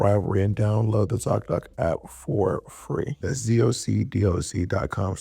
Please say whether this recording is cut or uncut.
cut